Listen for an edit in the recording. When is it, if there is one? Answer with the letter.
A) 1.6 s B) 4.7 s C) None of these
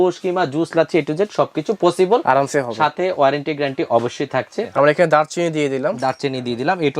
B